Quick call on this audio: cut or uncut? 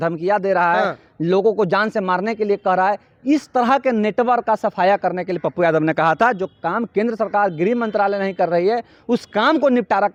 uncut